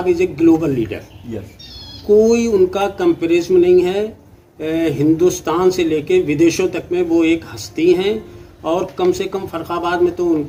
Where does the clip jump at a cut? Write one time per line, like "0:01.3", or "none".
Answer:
none